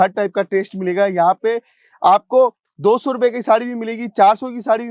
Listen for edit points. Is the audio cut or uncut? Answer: uncut